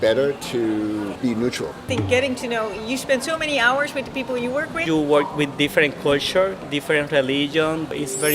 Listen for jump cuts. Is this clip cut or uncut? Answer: cut